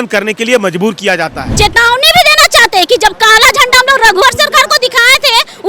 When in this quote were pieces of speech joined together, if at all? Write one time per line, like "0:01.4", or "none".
0:01.4